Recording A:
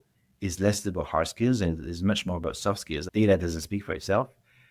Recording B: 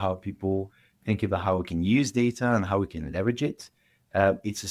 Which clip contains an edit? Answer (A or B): A